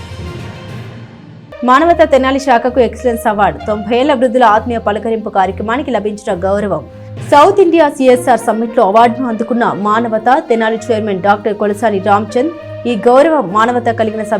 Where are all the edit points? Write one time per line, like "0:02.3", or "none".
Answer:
0:01.0